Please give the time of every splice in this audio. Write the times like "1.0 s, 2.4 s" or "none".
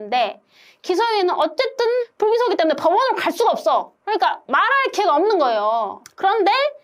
1.5 s, 4.0 s